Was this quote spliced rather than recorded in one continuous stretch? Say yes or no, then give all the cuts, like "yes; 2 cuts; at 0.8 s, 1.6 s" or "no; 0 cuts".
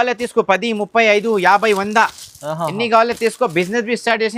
no; 0 cuts